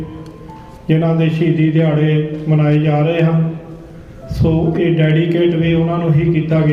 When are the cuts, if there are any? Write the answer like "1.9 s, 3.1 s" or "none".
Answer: none